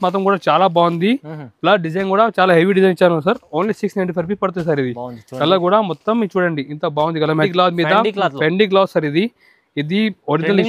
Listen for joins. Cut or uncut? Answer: cut